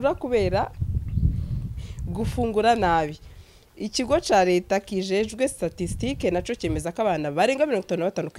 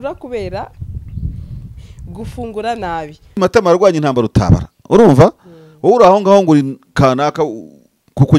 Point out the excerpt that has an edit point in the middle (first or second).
second